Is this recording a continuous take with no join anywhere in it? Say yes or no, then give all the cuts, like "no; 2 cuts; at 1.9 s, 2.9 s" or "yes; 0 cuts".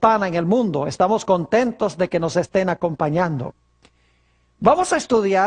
yes; 0 cuts